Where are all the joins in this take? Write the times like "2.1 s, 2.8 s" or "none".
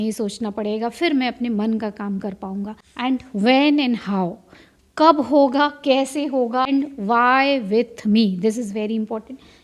2.8 s, 6.7 s